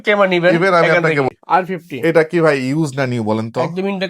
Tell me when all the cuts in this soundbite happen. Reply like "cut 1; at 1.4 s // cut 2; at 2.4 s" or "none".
cut 1; at 1.3 s